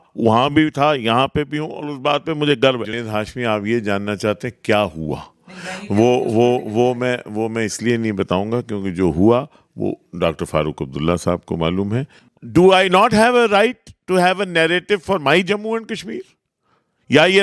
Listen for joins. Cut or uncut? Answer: cut